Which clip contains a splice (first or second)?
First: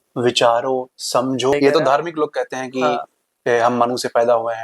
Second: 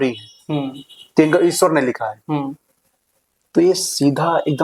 first